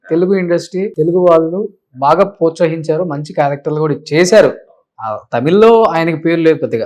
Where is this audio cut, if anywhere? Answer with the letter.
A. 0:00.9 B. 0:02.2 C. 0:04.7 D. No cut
A